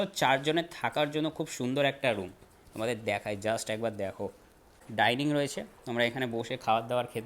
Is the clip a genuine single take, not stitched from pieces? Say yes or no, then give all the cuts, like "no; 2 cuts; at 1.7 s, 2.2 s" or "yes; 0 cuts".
no; 1 cut; at 4.8 s